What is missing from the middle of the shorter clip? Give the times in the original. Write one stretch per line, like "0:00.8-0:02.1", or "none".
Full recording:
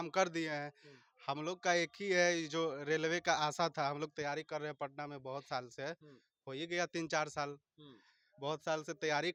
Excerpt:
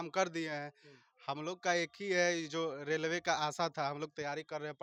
none